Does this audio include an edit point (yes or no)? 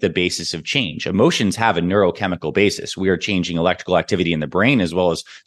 no